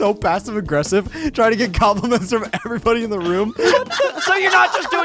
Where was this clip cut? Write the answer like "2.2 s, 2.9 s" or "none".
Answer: none